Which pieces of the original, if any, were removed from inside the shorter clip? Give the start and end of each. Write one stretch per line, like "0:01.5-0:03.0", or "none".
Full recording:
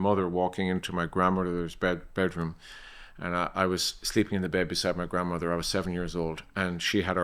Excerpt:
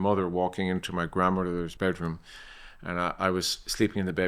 0:01.7-0:02.1